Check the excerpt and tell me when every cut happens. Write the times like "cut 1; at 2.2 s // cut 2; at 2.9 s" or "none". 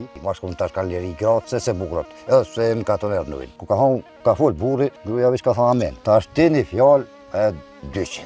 none